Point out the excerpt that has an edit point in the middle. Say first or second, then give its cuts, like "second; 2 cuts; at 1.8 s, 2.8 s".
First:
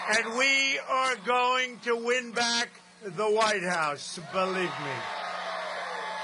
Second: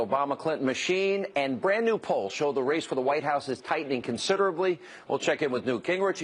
second; 1 cut; at 5.2 s